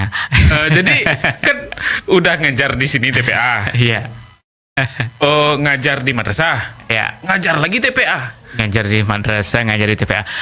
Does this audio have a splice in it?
no; 0 cuts

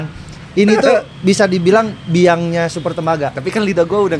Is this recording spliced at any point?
no; 0 cuts

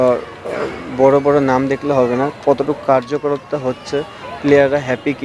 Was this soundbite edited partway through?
no; 0 cuts

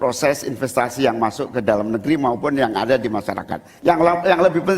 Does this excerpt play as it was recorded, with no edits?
no; 1 cut; at 3.7 s

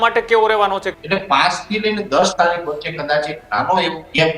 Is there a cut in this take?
yes; 1 cut; at 0.9 s

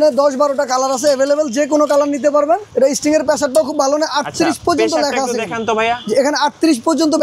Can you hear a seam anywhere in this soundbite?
yes; 1 cut; at 2.7 s

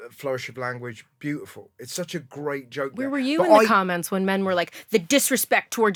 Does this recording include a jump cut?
no; 0 cuts

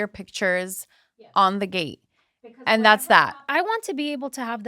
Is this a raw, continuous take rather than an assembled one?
no; 1 cut; at 3.5 s

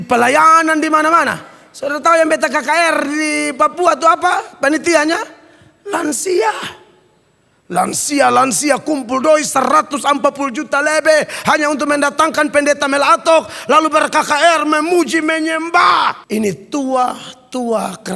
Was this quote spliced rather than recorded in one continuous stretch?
yes; 1 cut; at 16.2 s

